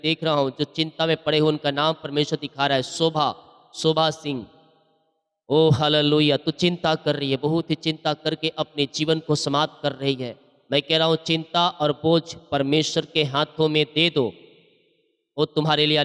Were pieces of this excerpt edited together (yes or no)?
no